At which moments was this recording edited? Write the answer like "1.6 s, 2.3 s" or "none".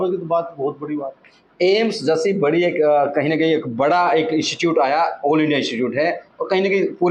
none